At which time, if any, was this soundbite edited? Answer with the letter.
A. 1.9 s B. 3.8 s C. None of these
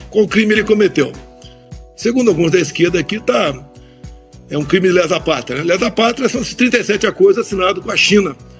C